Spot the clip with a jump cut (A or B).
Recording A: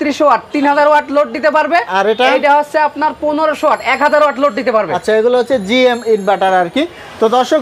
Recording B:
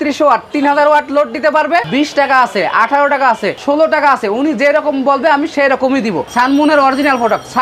B